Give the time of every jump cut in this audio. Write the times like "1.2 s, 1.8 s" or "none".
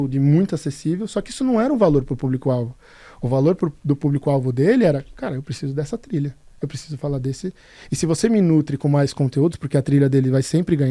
none